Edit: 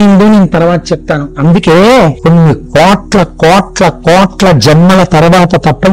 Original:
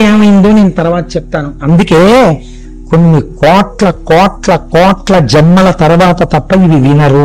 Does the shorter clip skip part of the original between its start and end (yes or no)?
yes